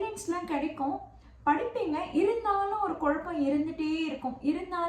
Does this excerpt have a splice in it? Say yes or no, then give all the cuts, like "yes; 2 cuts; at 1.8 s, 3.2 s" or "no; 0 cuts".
no; 0 cuts